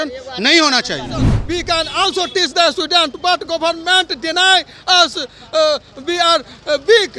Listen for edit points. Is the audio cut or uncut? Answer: cut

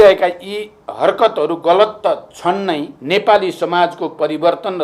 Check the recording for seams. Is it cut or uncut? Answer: cut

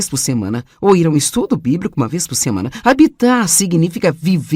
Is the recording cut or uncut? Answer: cut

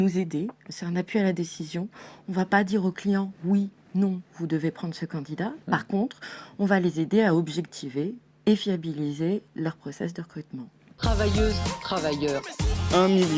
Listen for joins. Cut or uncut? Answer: cut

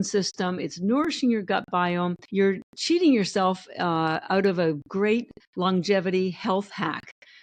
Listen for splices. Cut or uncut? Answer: cut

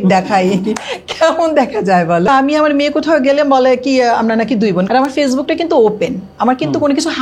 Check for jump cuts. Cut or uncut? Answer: cut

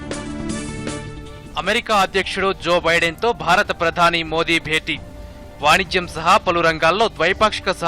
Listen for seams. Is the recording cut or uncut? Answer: cut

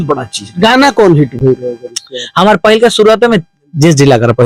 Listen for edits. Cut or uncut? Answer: uncut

